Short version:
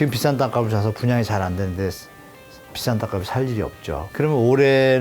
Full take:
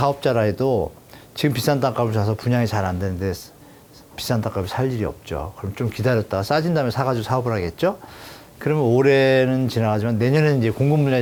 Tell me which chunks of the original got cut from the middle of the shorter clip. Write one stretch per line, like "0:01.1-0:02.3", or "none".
0:05.5-0:08.5